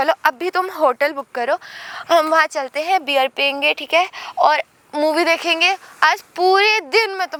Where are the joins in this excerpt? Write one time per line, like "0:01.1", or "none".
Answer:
none